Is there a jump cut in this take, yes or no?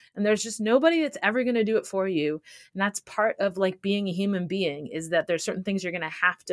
no